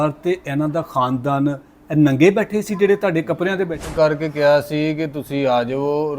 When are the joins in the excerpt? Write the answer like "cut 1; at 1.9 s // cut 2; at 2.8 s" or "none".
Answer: cut 1; at 3.9 s